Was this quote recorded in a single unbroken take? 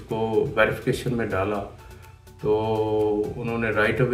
yes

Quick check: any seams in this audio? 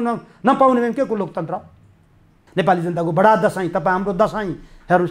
yes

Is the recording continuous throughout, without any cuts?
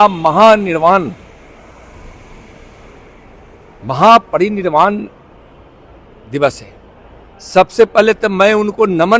yes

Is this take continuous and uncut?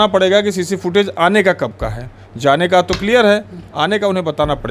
yes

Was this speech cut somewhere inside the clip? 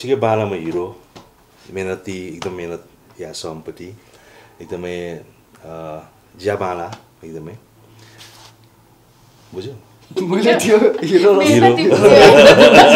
no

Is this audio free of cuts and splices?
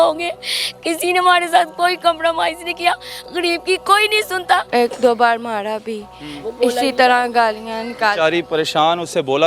no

